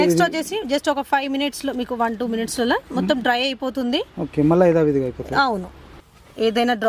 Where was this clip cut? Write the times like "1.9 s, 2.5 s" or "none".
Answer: 6.0 s